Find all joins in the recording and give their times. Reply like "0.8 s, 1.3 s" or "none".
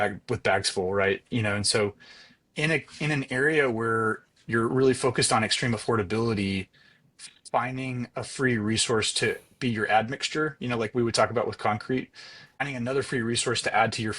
12.6 s